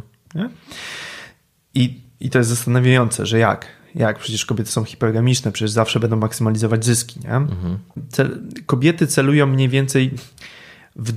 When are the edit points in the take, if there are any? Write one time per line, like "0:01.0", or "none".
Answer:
0:08.0